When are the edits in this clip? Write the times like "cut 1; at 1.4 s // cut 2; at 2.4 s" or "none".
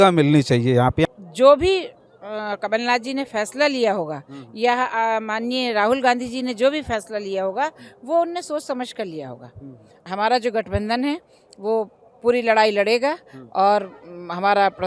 cut 1; at 1.0 s // cut 2; at 9.9 s